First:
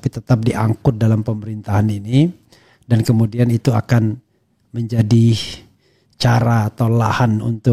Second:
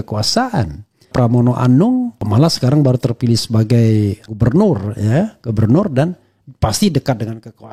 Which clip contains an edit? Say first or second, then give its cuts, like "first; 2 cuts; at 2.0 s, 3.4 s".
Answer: second; 3 cuts; at 1.1 s, 2.2 s, 4.3 s